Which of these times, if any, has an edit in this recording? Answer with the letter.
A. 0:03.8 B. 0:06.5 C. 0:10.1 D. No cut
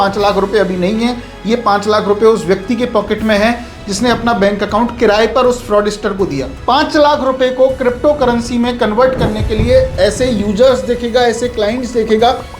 B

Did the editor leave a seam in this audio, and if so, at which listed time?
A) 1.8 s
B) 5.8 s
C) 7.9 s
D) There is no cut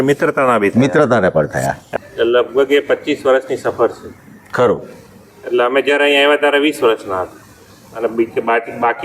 A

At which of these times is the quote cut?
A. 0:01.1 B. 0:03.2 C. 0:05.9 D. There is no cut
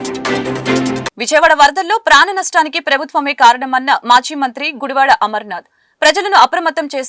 A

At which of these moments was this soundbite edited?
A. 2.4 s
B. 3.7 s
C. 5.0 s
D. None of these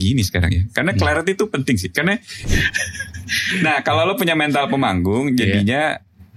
A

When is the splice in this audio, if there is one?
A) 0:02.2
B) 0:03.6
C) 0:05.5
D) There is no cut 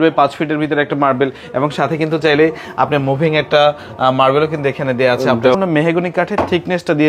C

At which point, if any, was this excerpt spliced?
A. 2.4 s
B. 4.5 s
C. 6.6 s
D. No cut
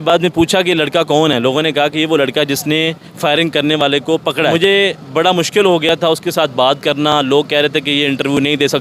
B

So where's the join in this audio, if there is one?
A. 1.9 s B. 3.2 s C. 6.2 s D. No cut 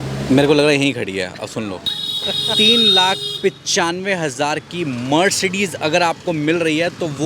A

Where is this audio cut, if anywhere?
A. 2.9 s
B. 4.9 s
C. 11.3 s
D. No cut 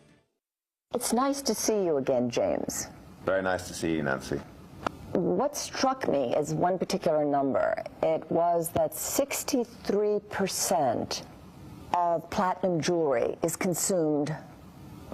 C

